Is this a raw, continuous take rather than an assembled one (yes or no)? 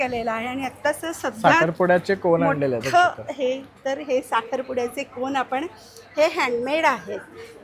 yes